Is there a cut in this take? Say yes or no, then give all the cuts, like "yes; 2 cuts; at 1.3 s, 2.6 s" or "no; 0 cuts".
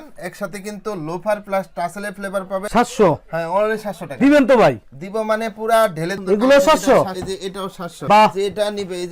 yes; 2 cuts; at 2.7 s, 6.1 s